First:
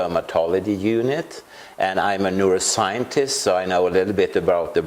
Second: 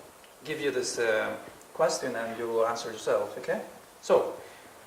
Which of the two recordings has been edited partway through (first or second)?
first